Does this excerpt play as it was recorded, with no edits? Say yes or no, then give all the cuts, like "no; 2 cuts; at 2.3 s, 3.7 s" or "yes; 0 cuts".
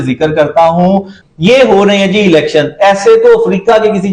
no; 1 cut; at 1.2 s